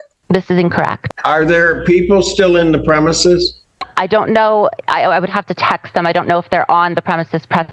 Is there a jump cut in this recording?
yes; 1 cut; at 1.0 s

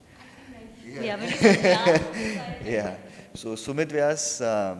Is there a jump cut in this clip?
no; 0 cuts

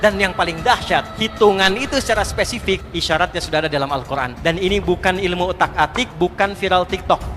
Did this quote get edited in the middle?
yes; 4 cuts; at 1.2 s, 2.9 s, 4.3 s, 6.0 s

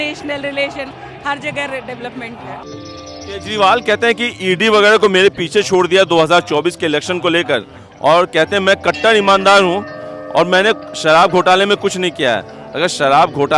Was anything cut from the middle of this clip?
yes; 1 cut; at 2.6 s

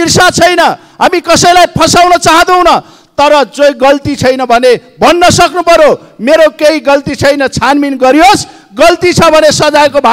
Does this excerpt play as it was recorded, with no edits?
yes; 0 cuts

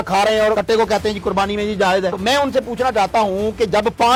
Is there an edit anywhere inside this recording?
no; 0 cuts

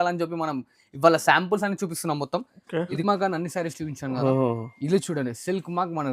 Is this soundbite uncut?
no; 1 cut; at 3.0 s

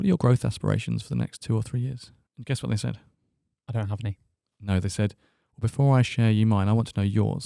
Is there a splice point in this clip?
no; 0 cuts

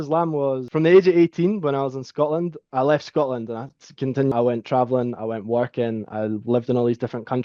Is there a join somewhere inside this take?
no; 0 cuts

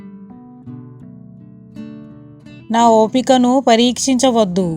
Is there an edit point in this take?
yes; 1 cut; at 2.1 s

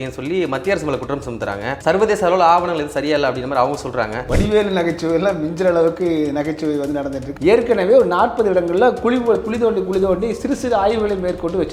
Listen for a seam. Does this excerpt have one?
yes; 3 cuts; at 1.7 s, 4.2 s, 7.2 s

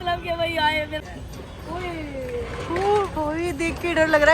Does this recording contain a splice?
yes; 1 cut; at 1.0 s

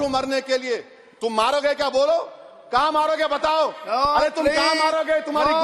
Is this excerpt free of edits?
yes; 0 cuts

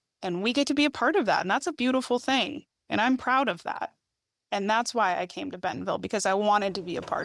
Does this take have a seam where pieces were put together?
no; 0 cuts

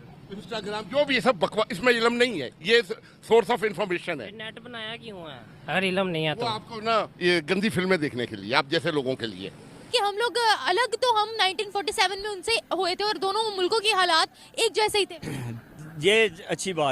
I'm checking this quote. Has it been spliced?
yes; 1 cut; at 9.9 s

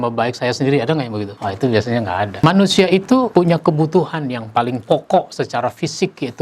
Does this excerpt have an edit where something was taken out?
yes; 3 cuts; at 1.3 s, 2.3 s, 3.3 s

